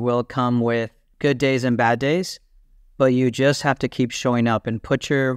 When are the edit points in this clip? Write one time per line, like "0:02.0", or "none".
0:01.0